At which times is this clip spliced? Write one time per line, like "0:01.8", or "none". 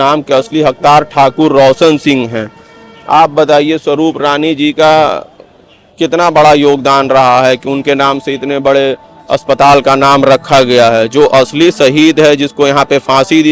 none